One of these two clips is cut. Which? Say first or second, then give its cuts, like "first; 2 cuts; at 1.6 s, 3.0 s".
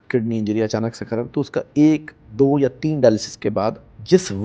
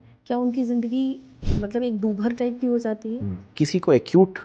second; 1 cut; at 3.5 s